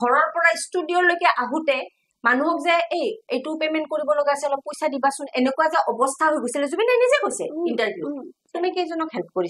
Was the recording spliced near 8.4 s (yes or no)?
yes